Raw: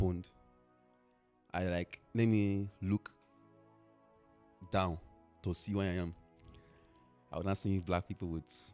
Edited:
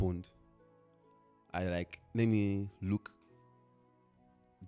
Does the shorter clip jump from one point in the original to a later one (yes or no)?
no